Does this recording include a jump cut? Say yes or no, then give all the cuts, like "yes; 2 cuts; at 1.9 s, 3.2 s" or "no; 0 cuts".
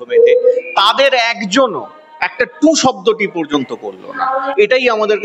no; 0 cuts